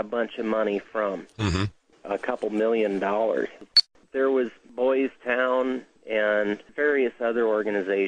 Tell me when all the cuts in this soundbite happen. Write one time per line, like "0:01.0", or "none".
0:02.4